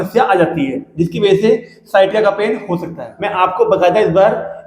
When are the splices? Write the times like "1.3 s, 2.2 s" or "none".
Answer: 3.0 s